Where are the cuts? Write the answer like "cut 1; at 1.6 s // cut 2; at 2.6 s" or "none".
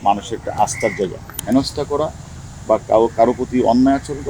cut 1; at 1.3 s